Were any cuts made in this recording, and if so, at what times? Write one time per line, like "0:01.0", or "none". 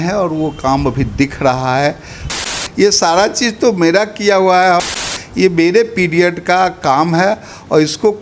0:02.6
0:04.9